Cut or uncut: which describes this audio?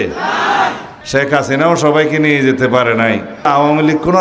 cut